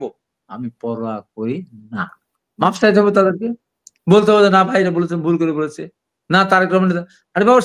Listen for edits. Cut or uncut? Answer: uncut